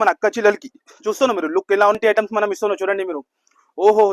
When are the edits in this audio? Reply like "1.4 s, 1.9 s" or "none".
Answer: 2.0 s

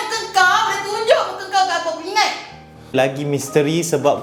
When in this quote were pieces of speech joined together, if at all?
2.9 s

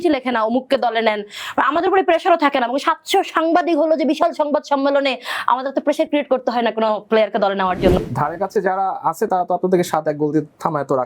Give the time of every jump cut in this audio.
8.0 s

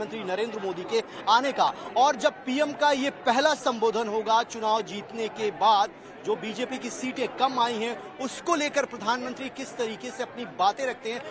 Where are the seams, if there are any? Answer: none

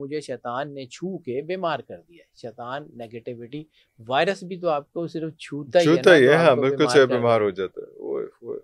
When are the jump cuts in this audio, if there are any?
none

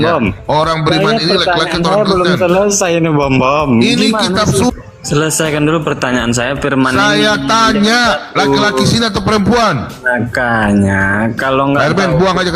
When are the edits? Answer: 4.7 s

